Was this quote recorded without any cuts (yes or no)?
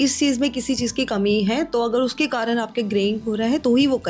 yes